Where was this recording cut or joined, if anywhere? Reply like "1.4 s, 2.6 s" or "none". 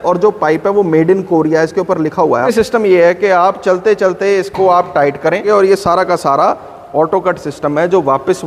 2.5 s, 5.4 s